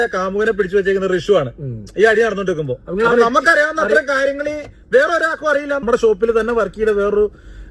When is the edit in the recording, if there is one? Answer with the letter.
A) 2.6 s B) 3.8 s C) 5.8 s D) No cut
C